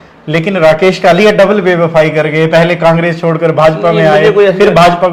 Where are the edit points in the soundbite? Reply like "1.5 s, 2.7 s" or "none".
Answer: none